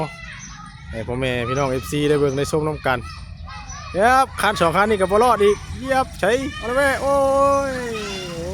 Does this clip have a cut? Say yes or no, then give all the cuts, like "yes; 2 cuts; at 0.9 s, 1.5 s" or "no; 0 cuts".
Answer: no; 0 cuts